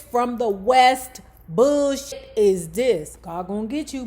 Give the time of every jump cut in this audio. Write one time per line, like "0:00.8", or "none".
0:02.1
0:03.1